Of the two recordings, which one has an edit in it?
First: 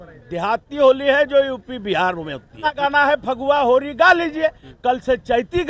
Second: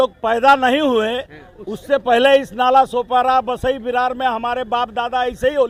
first; 1 cut; at 2.7 s

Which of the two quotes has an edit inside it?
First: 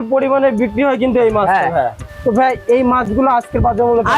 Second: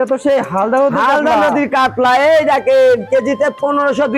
first; 1 cut; at 2.1 s

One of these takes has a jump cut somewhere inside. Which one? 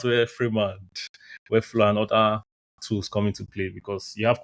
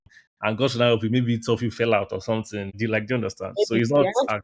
second; 1 cut; at 2.7 s

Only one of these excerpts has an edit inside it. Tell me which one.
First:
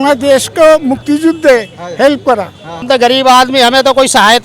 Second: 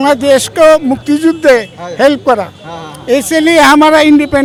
first; 1 cut; at 2.8 s

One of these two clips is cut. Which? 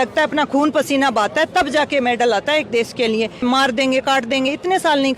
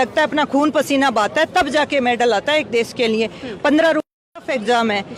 first; 1 cut; at 3.4 s

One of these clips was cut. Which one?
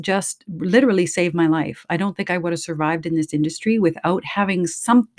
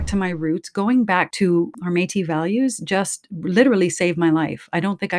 second; 1 cut; at 1.5 s

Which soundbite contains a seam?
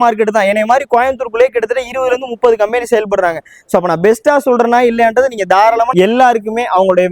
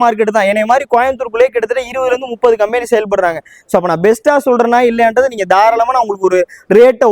first; 1 cut; at 5.9 s

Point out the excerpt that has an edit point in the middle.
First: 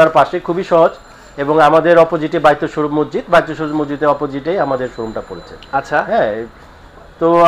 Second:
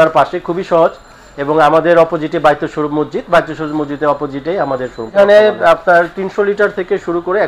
second; 1 cut; at 5.1 s

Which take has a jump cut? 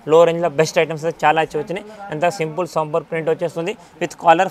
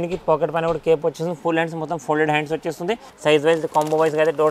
second; 1 cut; at 3.1 s

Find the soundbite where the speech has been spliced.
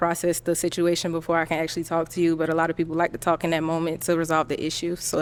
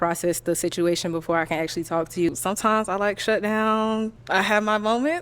second; 2 cuts; at 2.3 s, 4.2 s

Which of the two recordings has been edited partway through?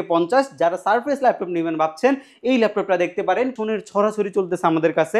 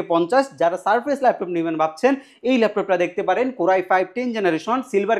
first; 1 cut; at 3.5 s

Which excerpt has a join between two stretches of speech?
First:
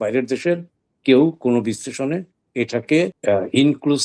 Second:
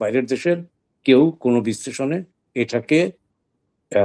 first; 1 cut; at 3.2 s

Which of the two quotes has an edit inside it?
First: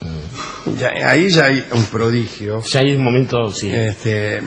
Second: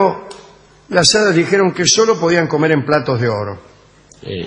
second; 1 cut; at 3.5 s

